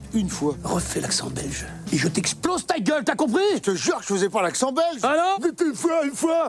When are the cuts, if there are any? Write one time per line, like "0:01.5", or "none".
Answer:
0:02.6